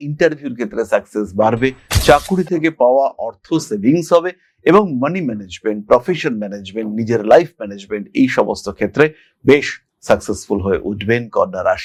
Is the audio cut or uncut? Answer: uncut